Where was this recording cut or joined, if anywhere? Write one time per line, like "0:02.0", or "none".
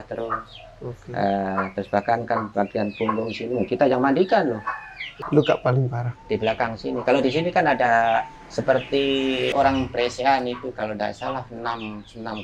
0:05.1
0:09.5